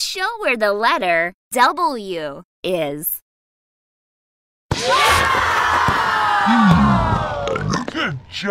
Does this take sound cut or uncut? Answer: cut